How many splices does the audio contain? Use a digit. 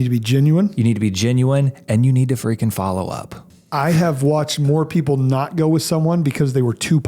1